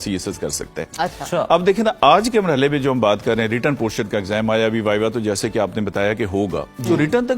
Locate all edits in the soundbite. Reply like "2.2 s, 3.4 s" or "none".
none